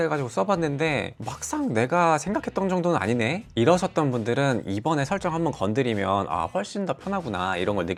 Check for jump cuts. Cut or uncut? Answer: uncut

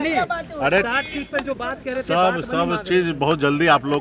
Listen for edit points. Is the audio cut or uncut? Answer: uncut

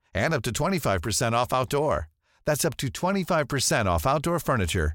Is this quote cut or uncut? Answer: uncut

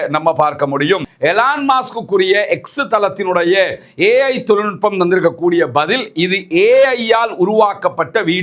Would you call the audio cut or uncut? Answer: cut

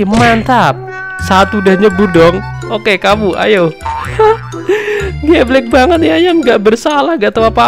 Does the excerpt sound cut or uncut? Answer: uncut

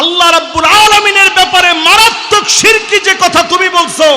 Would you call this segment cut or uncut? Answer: uncut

